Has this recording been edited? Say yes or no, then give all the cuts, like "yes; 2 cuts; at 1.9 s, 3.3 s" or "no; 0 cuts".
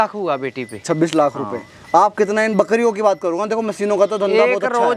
no; 0 cuts